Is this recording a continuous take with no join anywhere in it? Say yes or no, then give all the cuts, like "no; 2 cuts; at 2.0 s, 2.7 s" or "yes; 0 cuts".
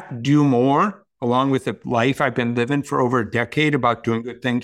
no; 1 cut; at 1.8 s